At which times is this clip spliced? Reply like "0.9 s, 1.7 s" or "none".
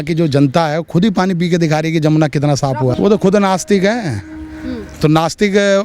2.9 s